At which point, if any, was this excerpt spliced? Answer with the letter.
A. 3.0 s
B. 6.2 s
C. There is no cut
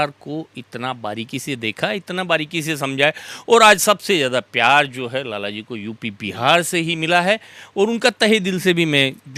C